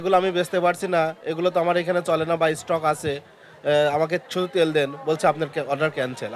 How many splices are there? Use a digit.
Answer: 0